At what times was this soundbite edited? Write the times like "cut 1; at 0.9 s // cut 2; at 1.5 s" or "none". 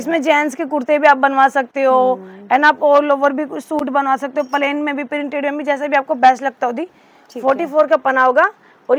none